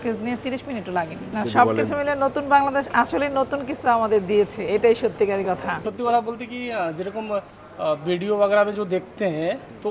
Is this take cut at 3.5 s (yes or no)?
no